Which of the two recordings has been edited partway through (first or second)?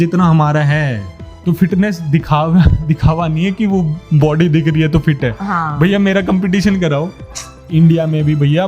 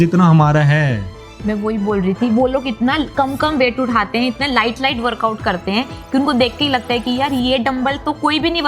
first